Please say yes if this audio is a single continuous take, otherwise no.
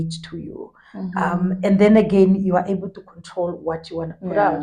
yes